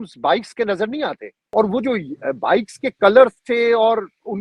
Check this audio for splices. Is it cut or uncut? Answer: cut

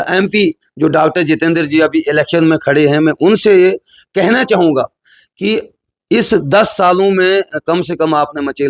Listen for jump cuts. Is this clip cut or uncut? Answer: uncut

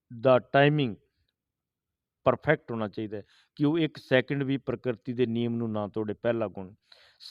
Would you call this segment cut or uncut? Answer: uncut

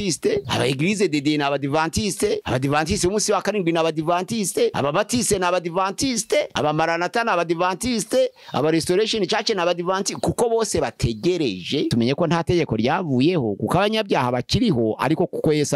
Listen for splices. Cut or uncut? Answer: cut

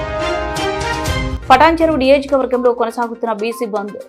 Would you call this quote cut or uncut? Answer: cut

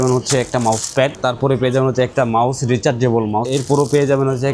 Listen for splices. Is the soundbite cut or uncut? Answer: cut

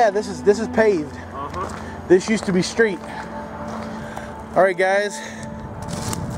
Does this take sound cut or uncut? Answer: cut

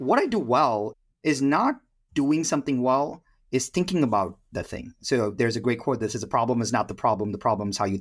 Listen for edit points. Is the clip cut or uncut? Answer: cut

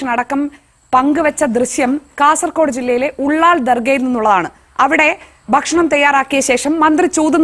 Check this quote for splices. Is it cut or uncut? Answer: uncut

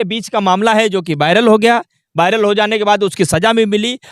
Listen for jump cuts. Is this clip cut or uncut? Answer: uncut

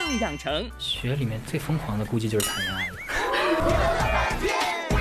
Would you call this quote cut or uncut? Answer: cut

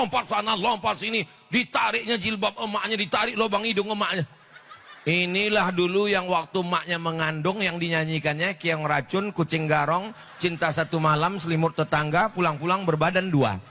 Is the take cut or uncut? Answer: uncut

